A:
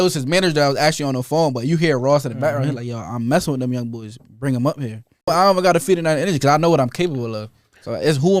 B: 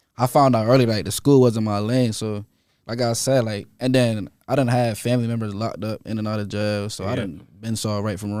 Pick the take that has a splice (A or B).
A